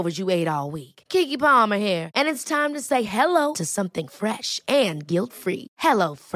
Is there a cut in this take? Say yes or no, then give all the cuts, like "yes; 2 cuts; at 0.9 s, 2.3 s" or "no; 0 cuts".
no; 0 cuts